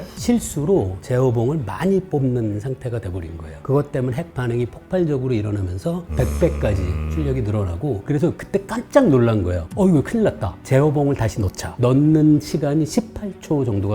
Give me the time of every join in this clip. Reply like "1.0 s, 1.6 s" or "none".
3.5 s, 6.0 s, 8.0 s